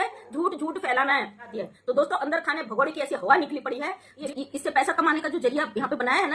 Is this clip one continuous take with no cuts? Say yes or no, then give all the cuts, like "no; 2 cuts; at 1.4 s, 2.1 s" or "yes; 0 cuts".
no; 2 cuts; at 1.5 s, 4.2 s